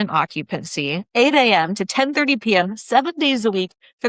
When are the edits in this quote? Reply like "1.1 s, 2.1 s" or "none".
1.0 s

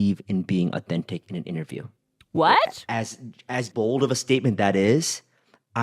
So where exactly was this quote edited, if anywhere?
3.7 s

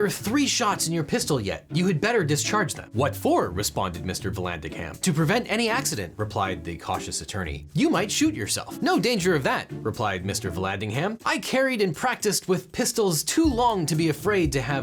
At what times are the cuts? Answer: none

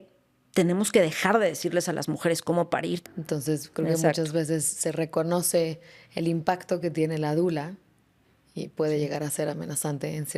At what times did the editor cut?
3.0 s

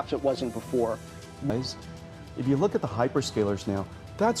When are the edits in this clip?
none

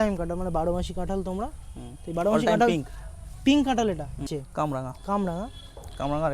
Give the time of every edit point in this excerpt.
4.4 s

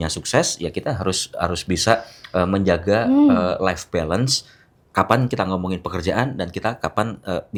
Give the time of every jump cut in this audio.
none

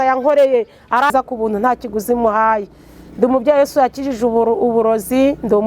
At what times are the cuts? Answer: 1.1 s

